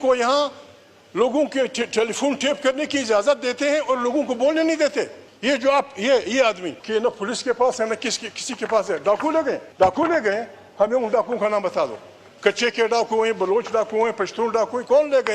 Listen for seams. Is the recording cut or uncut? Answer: cut